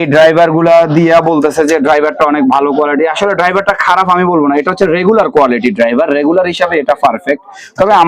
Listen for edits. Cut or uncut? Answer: uncut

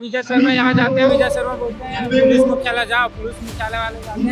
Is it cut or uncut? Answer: uncut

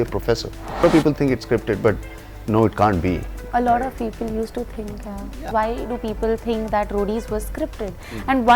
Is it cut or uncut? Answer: cut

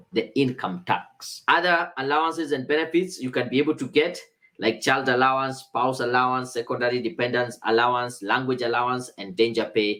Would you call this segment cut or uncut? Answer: uncut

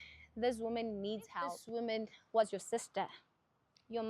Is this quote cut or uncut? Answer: cut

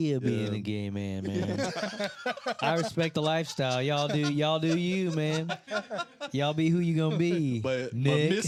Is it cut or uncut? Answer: uncut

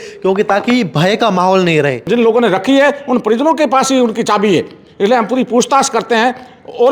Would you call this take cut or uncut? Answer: cut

